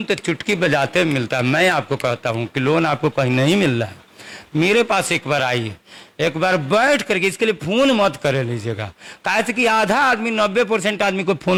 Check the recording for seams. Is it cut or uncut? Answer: uncut